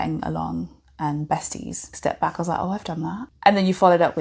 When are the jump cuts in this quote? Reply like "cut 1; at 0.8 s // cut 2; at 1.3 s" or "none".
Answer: cut 1; at 1.9 s // cut 2; at 3.3 s